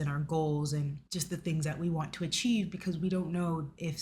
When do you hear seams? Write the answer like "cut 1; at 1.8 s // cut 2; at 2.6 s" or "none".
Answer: cut 1; at 1.0 s